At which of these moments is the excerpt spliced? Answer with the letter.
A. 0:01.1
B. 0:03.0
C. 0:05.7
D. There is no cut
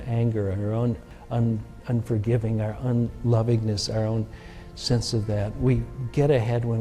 A